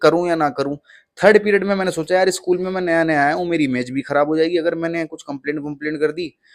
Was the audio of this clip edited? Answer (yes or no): no